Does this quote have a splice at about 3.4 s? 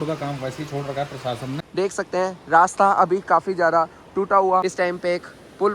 no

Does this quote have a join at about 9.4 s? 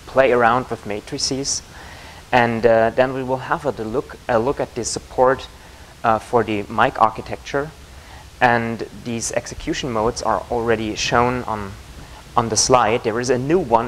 yes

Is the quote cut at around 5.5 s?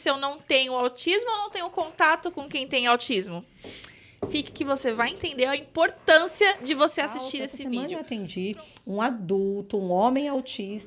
no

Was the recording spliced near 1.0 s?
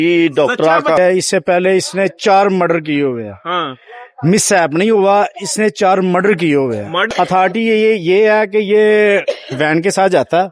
yes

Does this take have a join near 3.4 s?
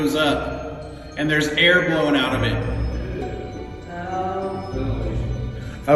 no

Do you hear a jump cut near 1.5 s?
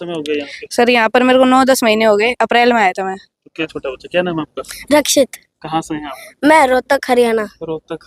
no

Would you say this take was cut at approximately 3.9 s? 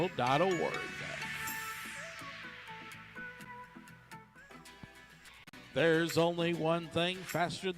no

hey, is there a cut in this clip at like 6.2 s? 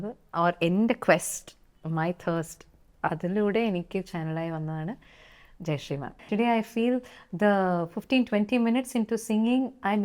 yes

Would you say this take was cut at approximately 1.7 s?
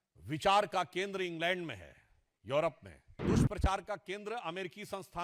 no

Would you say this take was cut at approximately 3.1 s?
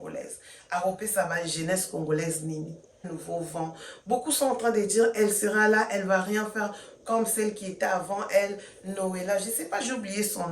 yes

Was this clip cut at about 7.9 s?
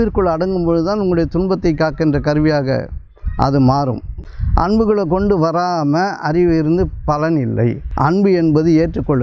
yes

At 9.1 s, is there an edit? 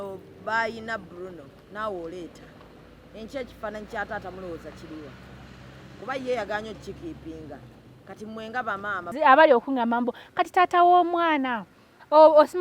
yes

